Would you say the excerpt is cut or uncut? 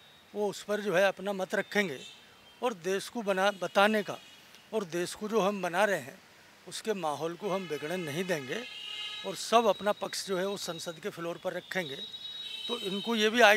uncut